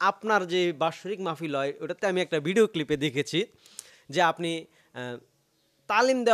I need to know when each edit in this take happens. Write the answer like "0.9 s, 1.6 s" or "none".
none